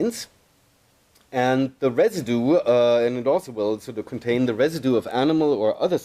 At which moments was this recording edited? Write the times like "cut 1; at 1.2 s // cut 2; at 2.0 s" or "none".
none

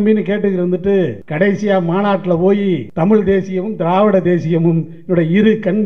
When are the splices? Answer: cut 1; at 1.2 s // cut 2; at 2.9 s

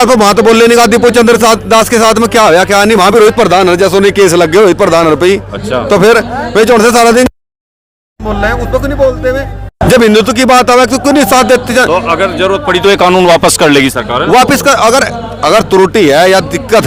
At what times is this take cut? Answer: none

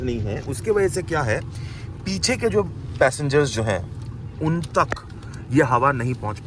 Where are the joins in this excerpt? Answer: none

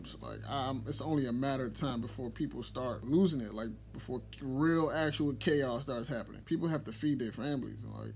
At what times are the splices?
cut 1; at 3.0 s

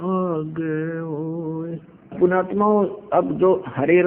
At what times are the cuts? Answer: cut 1; at 2.2 s

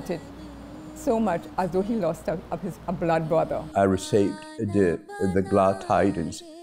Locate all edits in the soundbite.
cut 1; at 3.7 s // cut 2; at 5.1 s

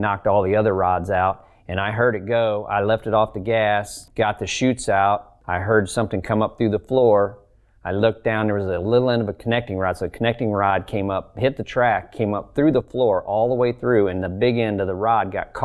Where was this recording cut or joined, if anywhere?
cut 1; at 4.0 s // cut 2; at 5.4 s

